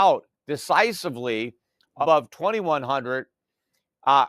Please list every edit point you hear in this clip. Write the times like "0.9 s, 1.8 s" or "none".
2.0 s